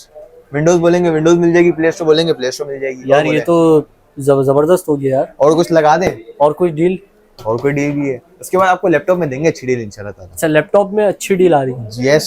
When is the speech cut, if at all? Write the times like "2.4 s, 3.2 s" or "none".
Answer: none